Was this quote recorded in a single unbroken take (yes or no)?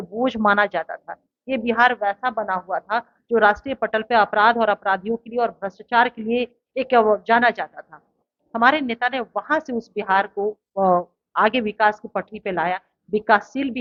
yes